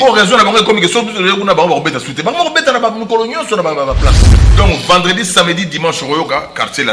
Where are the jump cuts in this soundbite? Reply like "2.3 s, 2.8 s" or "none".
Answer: 4.3 s